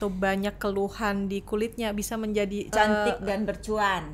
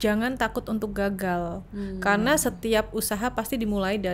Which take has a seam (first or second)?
first